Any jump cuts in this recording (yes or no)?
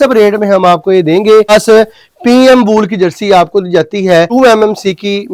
yes